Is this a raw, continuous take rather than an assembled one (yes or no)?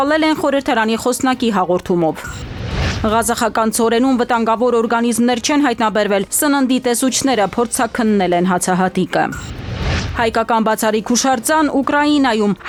yes